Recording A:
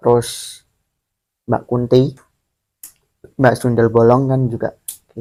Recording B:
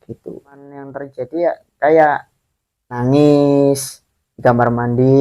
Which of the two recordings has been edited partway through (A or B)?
B